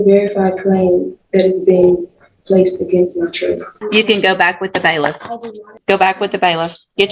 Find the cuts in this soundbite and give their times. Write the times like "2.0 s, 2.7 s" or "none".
3.7 s, 5.7 s